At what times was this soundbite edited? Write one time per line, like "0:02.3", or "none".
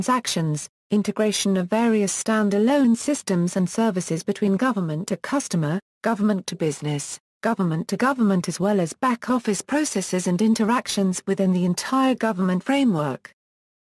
none